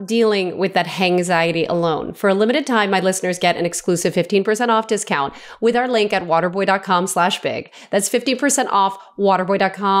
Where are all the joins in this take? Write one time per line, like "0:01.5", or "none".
none